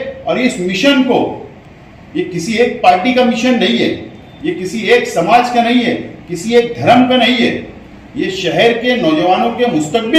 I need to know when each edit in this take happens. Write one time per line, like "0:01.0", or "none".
none